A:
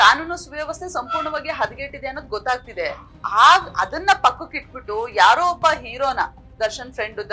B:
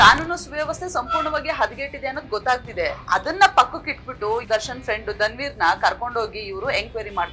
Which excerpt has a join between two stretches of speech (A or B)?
B